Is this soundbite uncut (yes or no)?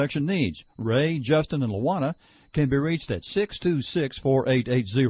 yes